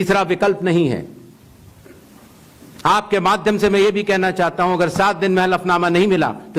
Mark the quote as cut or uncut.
uncut